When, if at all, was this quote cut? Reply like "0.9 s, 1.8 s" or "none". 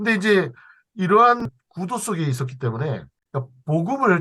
1.4 s, 3.1 s